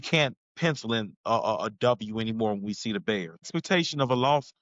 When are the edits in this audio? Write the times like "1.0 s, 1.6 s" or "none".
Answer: none